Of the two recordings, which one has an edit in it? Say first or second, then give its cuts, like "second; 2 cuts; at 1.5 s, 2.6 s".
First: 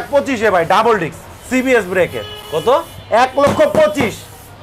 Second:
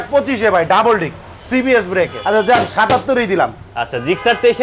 second; 1 cut; at 2.2 s